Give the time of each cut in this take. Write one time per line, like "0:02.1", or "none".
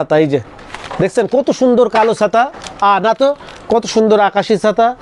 none

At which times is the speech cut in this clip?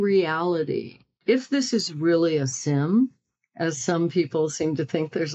0:01.1

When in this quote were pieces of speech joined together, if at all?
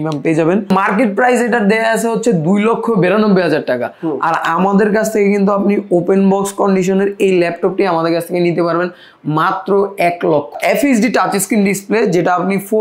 0:00.7
0:10.6

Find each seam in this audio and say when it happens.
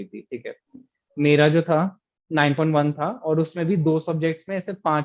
none

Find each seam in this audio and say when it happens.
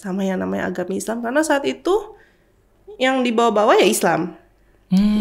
none

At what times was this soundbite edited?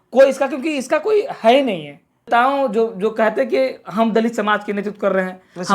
0:02.3

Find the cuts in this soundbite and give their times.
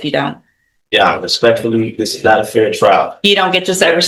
none

